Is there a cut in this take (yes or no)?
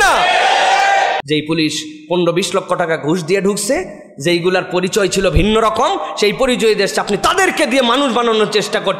yes